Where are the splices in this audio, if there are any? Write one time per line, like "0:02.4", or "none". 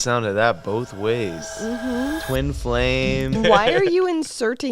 0:03.4